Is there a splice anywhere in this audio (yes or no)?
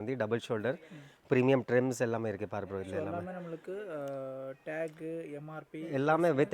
no